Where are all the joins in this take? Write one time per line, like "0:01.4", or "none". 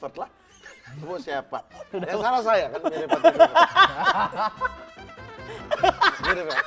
none